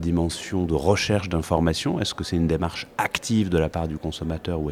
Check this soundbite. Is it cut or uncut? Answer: uncut